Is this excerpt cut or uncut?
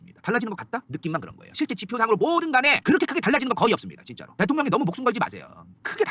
uncut